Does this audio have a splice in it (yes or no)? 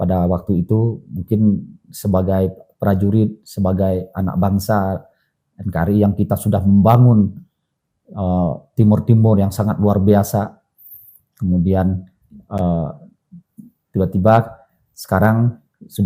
no